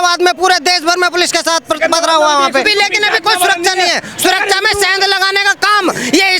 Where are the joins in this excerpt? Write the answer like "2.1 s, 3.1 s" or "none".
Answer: 2.6 s